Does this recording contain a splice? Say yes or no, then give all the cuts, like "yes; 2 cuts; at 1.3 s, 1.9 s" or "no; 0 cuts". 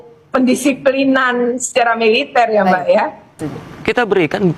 yes; 1 cut; at 3.3 s